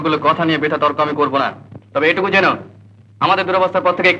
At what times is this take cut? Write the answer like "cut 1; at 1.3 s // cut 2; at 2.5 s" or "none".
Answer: none